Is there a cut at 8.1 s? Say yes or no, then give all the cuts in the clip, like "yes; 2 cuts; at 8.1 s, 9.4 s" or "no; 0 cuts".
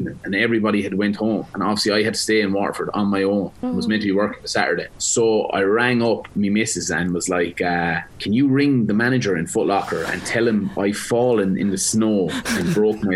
yes; 4 cuts; at 1.5 s, 3.6 s, 5.0 s, 8.1 s